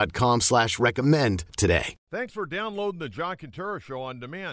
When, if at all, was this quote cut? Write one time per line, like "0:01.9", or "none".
0:01.9